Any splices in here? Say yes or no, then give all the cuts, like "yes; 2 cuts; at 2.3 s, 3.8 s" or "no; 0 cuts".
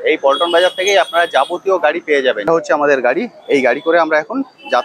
yes; 1 cut; at 2.5 s